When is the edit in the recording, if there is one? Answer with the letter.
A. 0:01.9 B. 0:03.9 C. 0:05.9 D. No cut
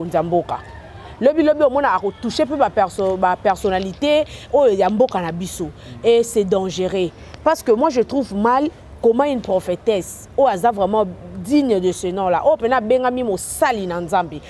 D